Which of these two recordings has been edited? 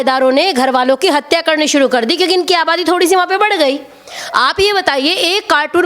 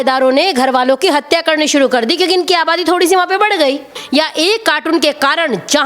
second; 1 cut; at 4.0 s

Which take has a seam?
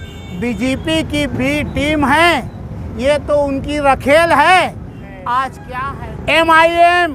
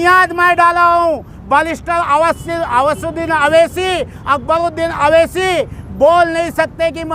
first; 1 cut; at 5.7 s

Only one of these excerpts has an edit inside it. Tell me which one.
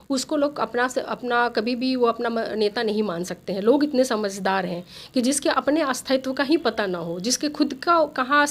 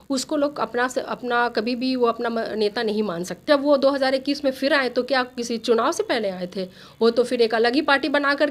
second; 1 cut; at 3.5 s

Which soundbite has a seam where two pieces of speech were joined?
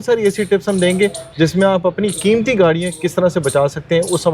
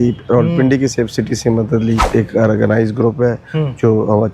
second; 1 cut; at 2.0 s

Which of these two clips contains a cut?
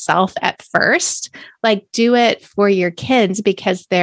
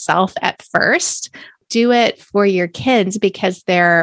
second; 1 cut; at 1.6 s

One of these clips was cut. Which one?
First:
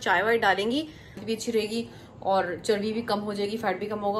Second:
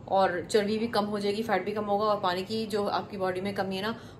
first; 1 cut; at 1.2 s

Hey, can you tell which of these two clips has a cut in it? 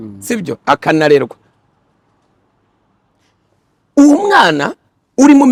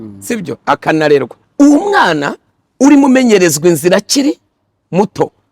second; 1 cut; at 1.4 s

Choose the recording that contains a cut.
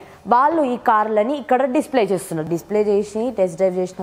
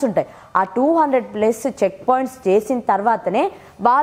first; 1 cut; at 2.5 s

